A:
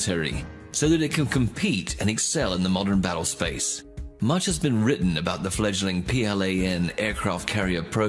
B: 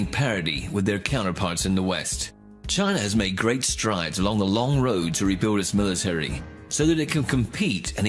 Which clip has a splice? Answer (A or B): A